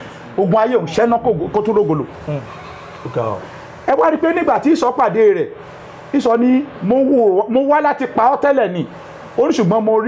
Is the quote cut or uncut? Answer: uncut